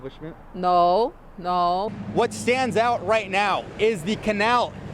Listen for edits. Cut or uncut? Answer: cut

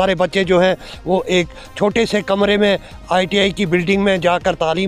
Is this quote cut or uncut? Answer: uncut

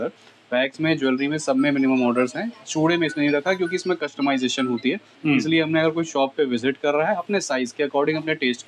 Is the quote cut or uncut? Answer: uncut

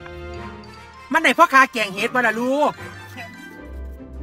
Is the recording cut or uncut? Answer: uncut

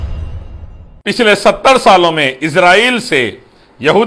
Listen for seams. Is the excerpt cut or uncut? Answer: cut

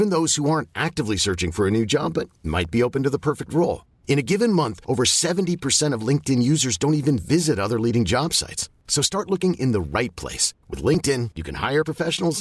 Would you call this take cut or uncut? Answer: uncut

